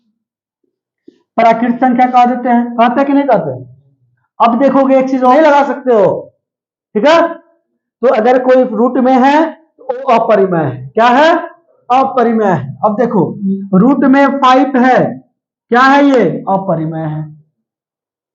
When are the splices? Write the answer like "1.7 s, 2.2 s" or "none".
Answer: 5.3 s